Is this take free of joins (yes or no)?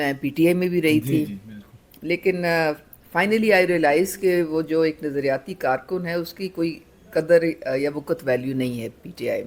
yes